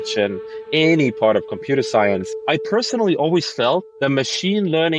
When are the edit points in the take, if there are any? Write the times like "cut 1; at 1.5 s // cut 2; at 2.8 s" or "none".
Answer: cut 1; at 3.9 s